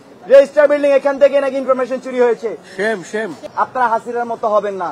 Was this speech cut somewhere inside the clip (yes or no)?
yes